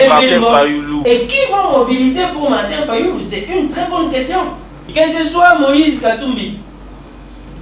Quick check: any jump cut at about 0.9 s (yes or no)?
yes